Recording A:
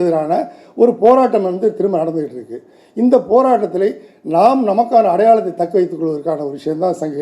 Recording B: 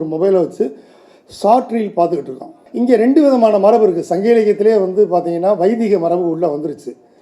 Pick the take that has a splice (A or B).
B